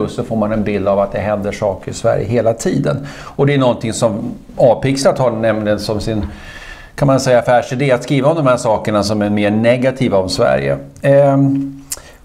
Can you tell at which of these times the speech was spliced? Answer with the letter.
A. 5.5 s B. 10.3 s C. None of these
B